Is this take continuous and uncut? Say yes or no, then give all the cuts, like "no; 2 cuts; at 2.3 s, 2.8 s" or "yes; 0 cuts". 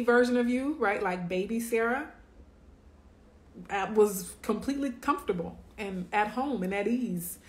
yes; 0 cuts